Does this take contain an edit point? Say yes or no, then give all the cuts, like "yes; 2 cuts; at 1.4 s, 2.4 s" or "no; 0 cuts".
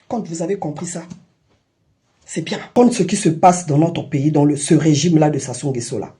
yes; 1 cut; at 2.7 s